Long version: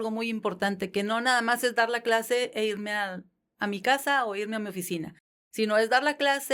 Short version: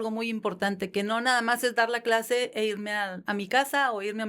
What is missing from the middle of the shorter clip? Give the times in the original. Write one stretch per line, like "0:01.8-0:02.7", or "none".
0:03.2-0:03.5